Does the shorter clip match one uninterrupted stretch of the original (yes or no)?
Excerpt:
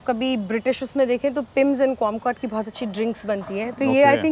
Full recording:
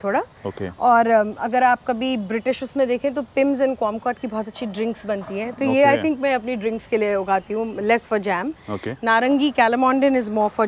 yes